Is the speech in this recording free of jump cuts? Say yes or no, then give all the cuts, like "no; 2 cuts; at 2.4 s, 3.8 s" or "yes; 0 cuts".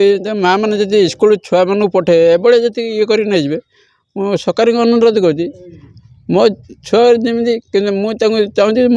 yes; 0 cuts